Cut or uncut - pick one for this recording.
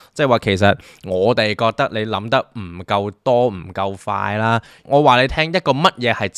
cut